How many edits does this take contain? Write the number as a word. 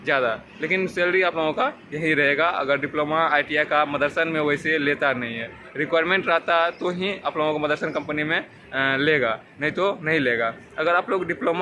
zero